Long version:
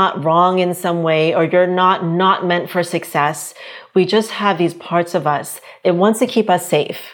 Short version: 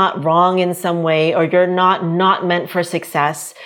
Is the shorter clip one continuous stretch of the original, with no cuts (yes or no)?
yes